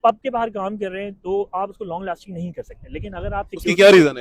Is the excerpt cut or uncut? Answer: uncut